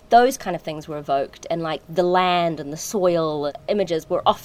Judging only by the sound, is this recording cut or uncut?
cut